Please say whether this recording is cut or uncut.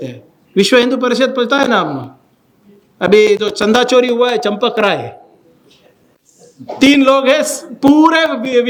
uncut